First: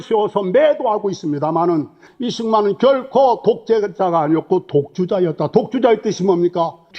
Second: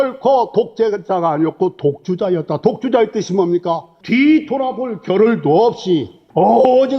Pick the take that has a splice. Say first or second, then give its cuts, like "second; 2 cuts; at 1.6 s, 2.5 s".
first; 1 cut; at 2.0 s